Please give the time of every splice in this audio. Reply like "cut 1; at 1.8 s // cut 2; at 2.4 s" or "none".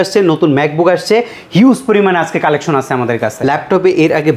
cut 1; at 3.3 s